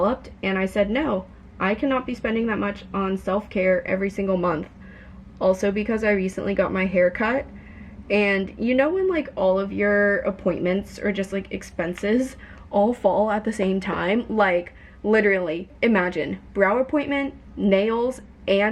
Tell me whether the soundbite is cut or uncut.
uncut